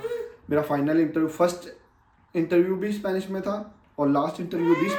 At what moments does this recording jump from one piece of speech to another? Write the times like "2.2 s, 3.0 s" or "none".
none